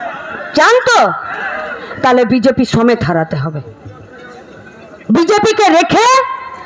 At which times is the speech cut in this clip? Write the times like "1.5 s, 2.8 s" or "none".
none